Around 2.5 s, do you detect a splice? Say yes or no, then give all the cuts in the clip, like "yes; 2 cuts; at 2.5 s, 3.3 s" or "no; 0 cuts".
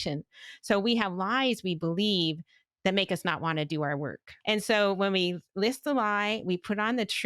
no; 1 cut; at 4.2 s